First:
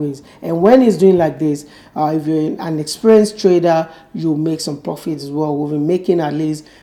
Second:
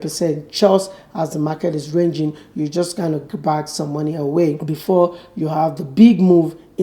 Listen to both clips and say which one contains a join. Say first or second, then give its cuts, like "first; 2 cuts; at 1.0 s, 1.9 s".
second; 1 cut; at 4.7 s